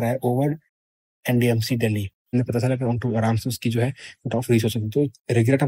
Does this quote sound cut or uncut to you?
cut